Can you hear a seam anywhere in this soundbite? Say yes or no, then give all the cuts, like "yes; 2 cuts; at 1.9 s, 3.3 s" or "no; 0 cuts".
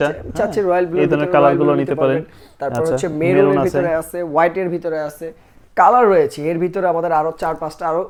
no; 0 cuts